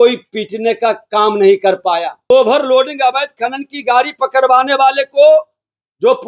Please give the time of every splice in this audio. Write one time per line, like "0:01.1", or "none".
0:02.3